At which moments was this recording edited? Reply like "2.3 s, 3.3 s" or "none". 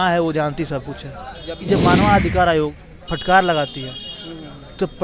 1.5 s